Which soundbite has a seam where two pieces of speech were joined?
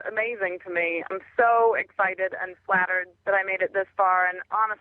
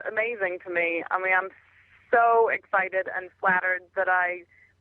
first; 2 cuts; at 1.0 s, 3.0 s

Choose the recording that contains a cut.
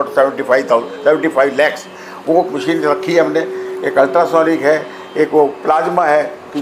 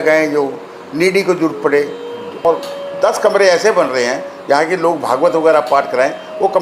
second; 1 cut; at 2.4 s

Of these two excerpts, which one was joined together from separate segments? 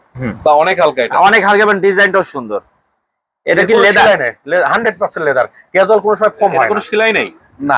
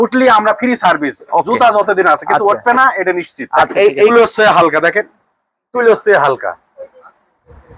second; 1 cut; at 4.1 s

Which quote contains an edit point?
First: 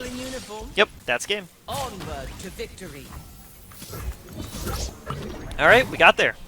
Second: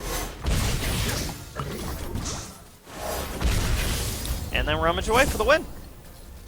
first; 1 cut; at 1.0 s

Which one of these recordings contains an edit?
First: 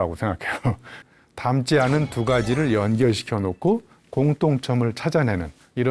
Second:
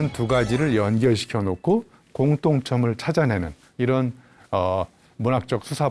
first; 1 cut; at 1.0 s

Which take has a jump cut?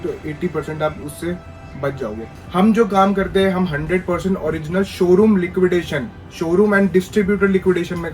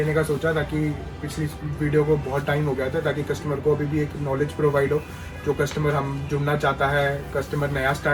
first; 1 cut; at 2.3 s

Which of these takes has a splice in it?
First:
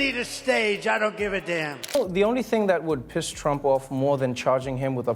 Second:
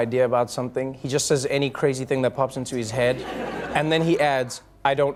first; 1 cut; at 1.9 s

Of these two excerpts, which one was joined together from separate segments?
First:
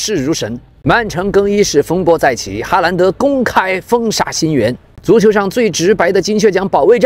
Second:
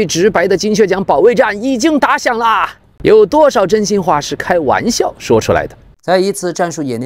second; 1 cut; at 5.8 s

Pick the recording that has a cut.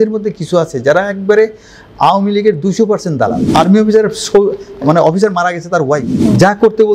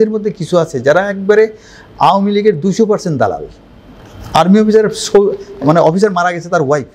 first; 2 cuts; at 3.4 s, 6.2 s

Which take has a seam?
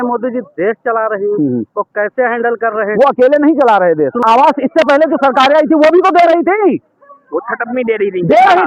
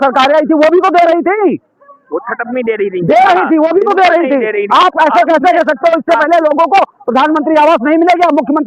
first; 1 cut; at 4.2 s

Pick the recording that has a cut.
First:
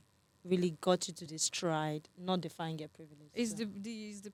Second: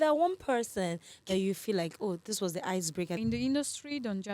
second; 1 cut; at 3.2 s

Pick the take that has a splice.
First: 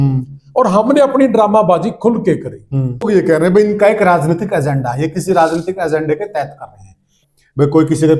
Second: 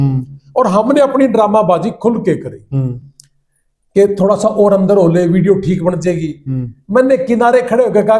first; 2 cuts; at 3.0 s, 7.1 s

